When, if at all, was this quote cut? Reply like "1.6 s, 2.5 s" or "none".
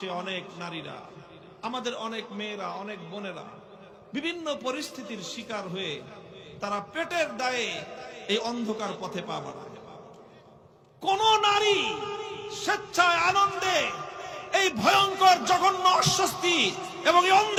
none